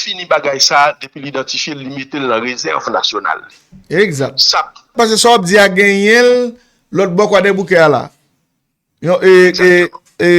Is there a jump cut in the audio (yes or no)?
yes